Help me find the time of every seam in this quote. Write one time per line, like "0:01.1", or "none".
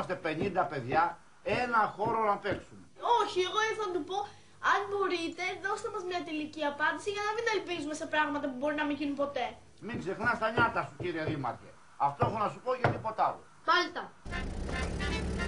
0:08.7